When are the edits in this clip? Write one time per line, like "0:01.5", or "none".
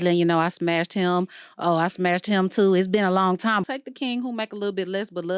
0:03.6